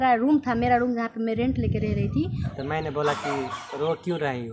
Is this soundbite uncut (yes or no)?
no